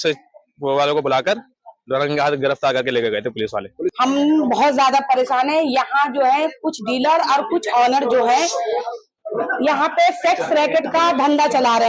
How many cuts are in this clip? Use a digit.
2